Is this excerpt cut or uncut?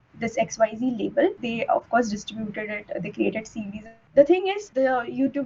cut